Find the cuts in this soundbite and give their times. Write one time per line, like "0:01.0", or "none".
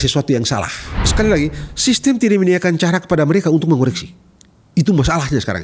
0:01.0

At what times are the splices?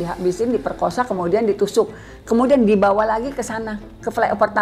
none

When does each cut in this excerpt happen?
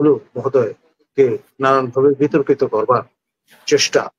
none

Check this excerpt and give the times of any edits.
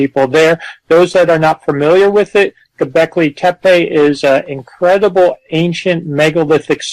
0:01.8

